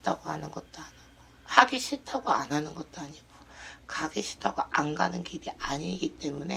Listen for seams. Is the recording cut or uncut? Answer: uncut